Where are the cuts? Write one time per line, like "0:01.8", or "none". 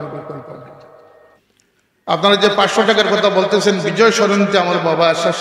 0:01.2